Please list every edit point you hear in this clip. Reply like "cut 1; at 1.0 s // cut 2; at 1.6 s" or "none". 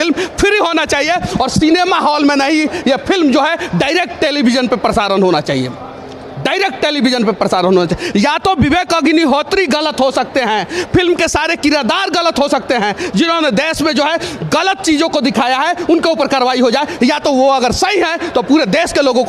none